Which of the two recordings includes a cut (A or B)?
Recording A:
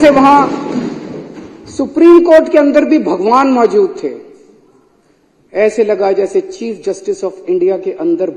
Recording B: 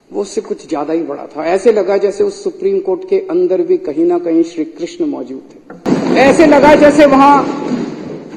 B